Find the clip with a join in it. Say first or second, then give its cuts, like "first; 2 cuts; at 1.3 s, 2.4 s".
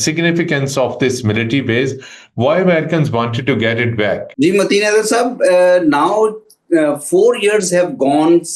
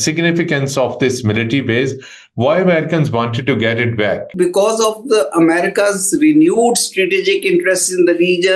second; 1 cut; at 4.3 s